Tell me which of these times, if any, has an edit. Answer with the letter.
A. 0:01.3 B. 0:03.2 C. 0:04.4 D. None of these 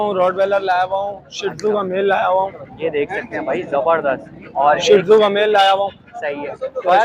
D